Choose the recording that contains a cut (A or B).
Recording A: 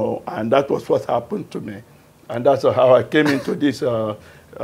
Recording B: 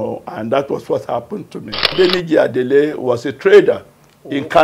B